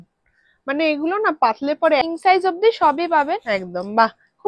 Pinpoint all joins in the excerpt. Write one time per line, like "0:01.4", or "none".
0:02.0

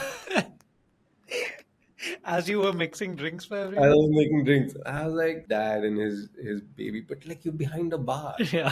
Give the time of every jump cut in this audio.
0:05.4

